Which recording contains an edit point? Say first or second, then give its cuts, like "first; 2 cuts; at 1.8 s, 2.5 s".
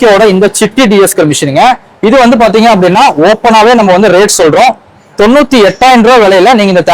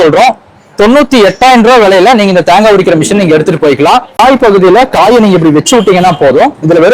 second; 1 cut; at 4.2 s